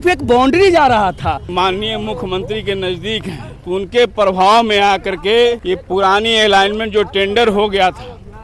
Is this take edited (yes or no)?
yes